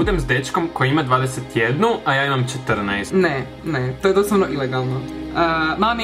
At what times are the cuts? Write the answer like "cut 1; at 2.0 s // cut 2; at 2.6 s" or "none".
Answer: cut 1; at 3.0 s // cut 2; at 5.0 s